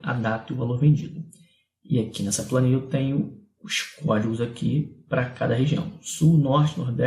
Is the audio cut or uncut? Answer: uncut